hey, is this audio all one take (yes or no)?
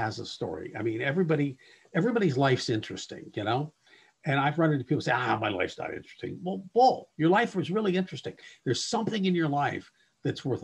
yes